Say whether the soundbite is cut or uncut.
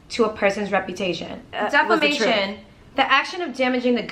cut